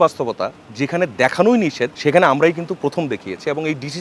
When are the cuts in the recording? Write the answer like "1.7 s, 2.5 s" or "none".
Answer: none